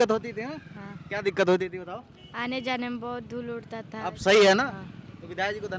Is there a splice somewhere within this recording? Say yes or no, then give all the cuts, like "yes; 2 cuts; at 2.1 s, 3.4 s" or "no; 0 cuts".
no; 0 cuts